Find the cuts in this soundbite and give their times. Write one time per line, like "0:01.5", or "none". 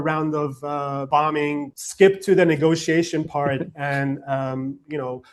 0:01.0
0:01.8